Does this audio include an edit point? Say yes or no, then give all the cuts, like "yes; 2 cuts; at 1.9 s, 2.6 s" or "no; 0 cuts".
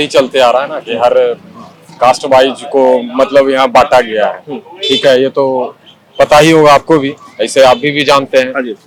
no; 0 cuts